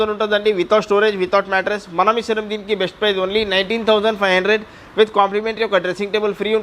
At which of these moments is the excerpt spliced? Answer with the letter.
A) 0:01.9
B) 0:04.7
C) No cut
C